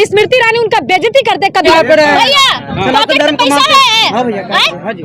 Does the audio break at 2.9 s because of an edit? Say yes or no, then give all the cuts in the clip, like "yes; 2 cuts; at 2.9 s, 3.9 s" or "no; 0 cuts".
no; 1 cut; at 1.7 s